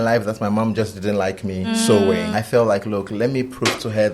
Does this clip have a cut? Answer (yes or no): yes